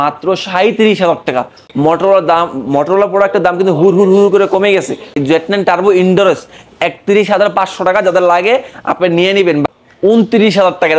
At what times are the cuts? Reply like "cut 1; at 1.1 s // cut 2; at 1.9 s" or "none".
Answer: cut 1; at 1.6 s // cut 2; at 5.2 s // cut 3; at 9.7 s